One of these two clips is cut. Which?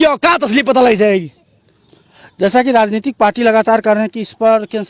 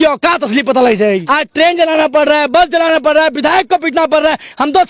second; 1 cut; at 1.2 s

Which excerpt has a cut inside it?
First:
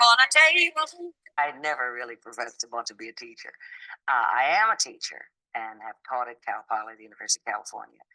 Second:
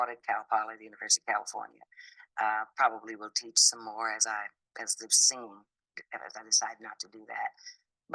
first; 1 cut; at 1.2 s

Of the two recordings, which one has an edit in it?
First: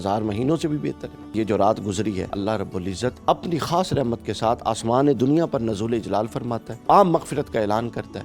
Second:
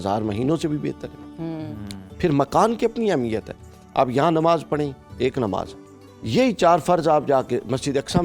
first; 3 cuts; at 1.3 s, 2.8 s, 6.7 s

